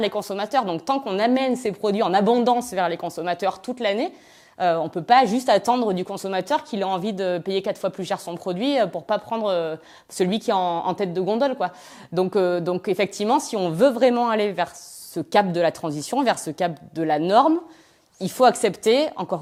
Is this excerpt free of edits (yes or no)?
yes